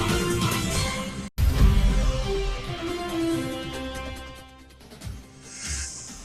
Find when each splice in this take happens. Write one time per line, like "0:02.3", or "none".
none